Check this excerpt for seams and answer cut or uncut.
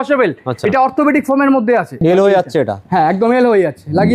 cut